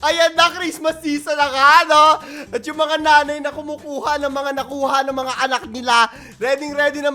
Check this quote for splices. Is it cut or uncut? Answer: uncut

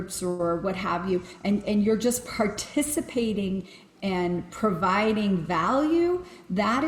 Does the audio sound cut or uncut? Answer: uncut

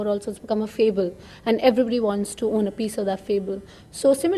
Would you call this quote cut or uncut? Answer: uncut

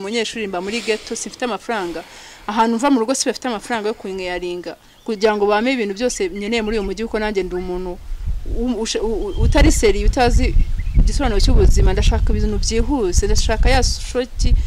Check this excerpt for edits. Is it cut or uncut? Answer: uncut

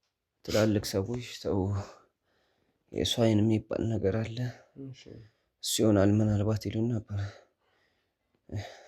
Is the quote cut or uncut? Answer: uncut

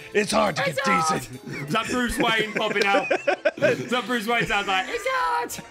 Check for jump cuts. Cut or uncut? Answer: uncut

